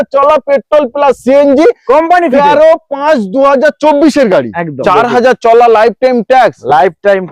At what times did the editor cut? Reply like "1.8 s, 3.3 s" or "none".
4.8 s